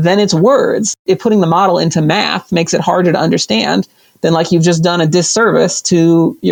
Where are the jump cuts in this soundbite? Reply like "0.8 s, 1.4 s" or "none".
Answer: none